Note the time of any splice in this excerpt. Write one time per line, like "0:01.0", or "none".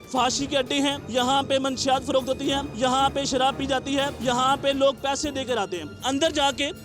0:01.0
0:02.7
0:04.1
0:06.0

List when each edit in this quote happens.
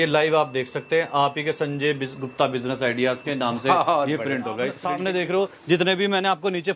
0:04.8

